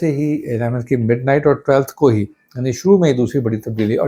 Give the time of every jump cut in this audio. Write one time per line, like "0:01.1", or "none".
none